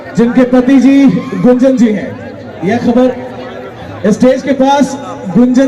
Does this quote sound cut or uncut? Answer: uncut